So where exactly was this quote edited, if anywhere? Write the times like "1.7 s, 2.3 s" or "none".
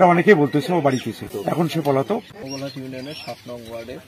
1.3 s, 2.3 s